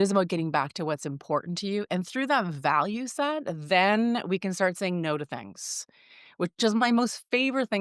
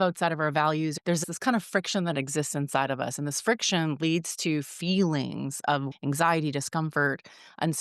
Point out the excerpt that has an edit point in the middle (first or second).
second